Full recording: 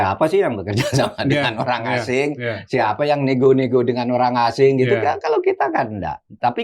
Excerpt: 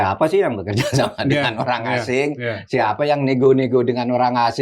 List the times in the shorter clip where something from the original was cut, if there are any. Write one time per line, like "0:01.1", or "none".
none